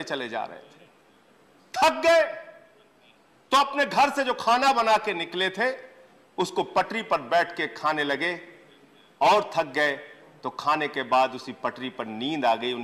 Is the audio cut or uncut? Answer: uncut